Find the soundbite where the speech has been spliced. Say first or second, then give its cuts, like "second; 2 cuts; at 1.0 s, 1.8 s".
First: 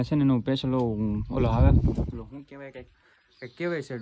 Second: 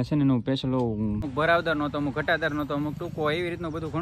second; 1 cut; at 1.3 s